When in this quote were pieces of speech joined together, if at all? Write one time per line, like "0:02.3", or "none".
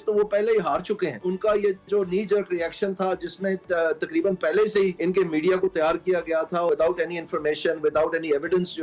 0:01.2
0:05.0
0:06.7